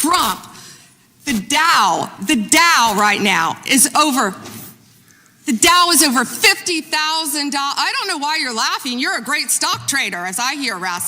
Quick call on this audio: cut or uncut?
cut